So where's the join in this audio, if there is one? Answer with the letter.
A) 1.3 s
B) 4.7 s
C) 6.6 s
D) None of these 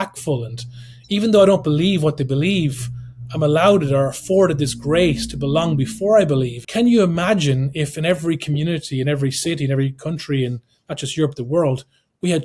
C